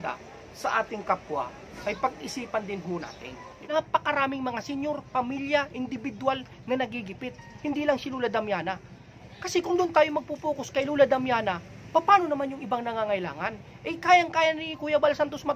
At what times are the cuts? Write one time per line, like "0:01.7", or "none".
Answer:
0:03.5
0:09.1